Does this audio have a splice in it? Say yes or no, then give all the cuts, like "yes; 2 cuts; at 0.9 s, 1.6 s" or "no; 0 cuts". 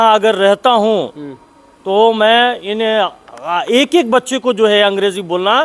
no; 0 cuts